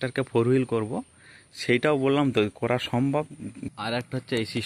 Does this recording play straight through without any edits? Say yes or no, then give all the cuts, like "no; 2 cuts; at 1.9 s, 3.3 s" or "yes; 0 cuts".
no; 1 cut; at 3.7 s